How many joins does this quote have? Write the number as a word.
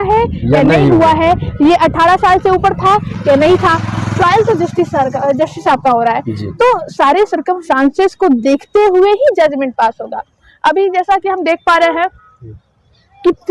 zero